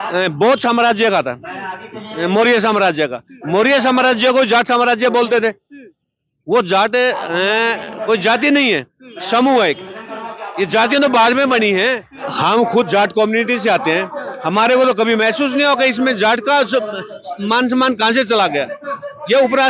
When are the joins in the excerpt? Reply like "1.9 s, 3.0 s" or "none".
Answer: 12.3 s